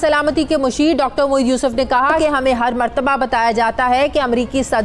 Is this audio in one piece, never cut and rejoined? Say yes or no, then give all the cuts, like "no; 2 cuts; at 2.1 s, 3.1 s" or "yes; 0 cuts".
no; 1 cut; at 2.1 s